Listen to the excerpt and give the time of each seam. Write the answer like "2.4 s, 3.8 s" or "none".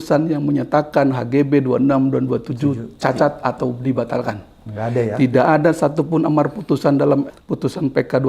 none